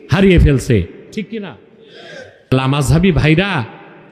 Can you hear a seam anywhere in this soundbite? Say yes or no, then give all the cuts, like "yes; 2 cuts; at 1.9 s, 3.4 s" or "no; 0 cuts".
yes; 1 cut; at 2.7 s